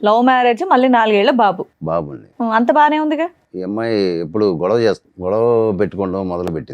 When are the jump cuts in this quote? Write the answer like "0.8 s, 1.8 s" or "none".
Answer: 3.5 s, 5.1 s